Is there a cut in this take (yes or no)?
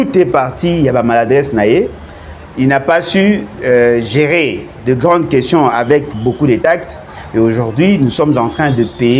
no